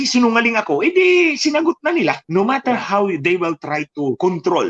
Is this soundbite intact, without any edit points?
no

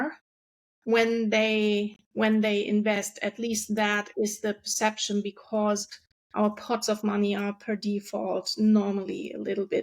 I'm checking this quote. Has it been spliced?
no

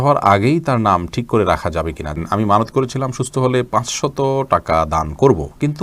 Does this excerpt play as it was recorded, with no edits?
no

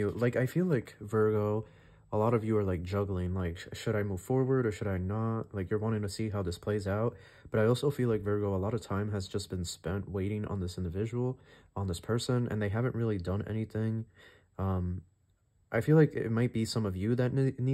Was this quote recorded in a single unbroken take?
yes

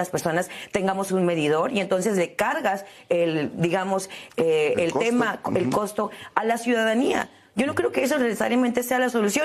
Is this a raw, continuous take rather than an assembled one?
yes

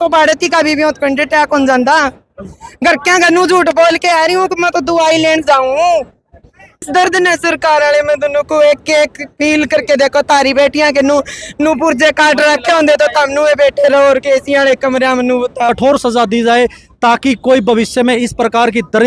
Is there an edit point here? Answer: yes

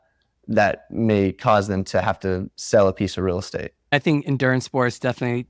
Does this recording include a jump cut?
yes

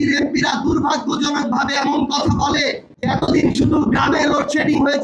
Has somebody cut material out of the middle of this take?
yes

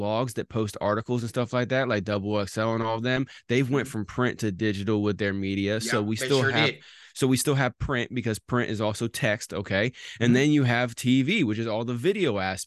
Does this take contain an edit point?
no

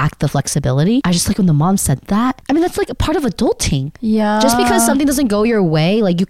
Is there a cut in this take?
yes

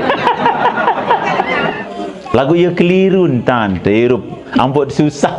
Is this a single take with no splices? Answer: no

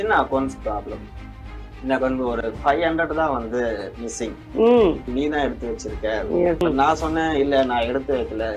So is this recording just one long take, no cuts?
no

